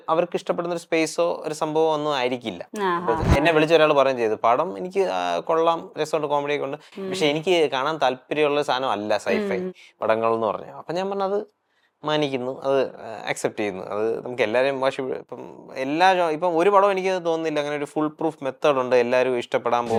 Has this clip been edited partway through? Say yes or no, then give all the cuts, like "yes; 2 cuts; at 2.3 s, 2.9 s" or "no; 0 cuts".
no; 0 cuts